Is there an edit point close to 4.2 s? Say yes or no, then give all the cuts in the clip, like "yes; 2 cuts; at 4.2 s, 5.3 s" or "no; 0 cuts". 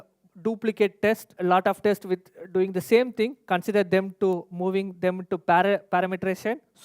no; 1 cut; at 1.3 s